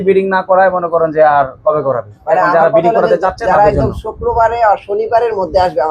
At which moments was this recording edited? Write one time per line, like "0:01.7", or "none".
none